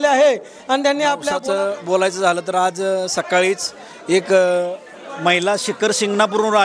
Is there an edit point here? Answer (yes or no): yes